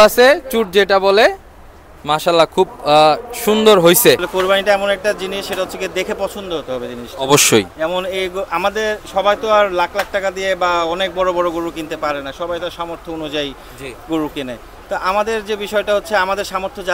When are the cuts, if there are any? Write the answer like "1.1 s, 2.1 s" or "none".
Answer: 4.3 s